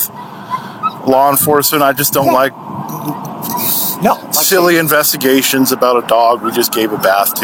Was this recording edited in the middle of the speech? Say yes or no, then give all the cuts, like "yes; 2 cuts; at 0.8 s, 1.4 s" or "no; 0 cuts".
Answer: no; 0 cuts